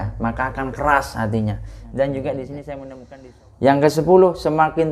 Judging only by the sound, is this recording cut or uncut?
cut